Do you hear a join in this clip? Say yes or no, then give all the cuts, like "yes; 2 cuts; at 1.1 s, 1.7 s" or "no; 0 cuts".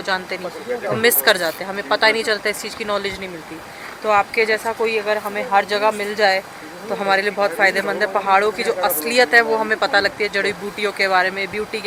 no; 0 cuts